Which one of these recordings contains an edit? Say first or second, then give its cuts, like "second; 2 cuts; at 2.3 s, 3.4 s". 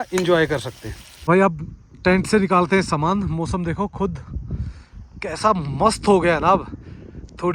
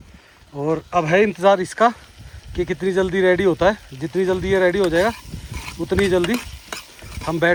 first; 1 cut; at 1.1 s